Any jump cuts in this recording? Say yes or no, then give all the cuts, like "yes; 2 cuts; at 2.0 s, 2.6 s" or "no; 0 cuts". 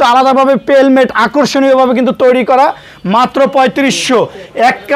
no; 0 cuts